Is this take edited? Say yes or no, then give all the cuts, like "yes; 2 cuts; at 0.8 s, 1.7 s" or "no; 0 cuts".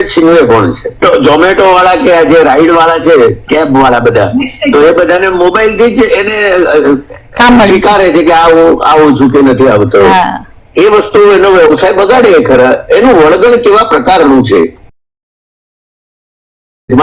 no; 0 cuts